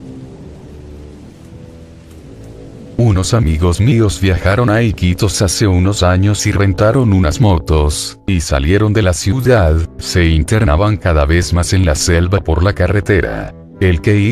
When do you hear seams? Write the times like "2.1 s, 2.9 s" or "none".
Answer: 7.8 s